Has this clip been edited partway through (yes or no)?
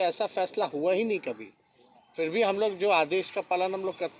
no